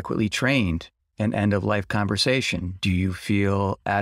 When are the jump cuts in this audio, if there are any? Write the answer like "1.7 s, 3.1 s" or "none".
1.0 s